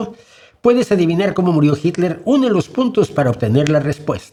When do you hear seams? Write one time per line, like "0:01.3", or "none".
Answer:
none